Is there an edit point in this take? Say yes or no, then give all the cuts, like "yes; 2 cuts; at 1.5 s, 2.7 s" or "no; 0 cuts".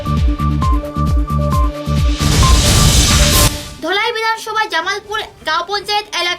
yes; 1 cut; at 3.6 s